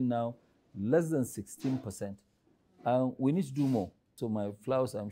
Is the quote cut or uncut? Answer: cut